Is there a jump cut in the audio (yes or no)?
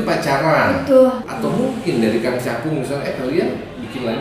yes